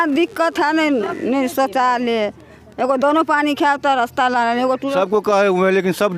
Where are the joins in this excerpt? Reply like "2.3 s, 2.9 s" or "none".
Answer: 4.9 s